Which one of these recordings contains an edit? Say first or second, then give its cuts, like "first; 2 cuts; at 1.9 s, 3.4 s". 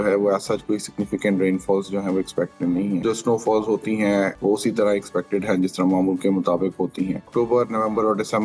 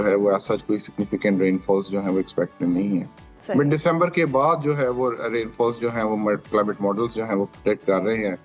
first; 3 cuts; at 3.0 s, 4.4 s, 7.3 s